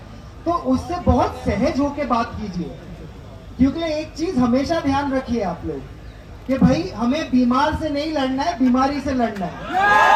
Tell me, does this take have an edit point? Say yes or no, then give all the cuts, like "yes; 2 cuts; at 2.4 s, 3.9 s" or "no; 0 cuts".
no; 0 cuts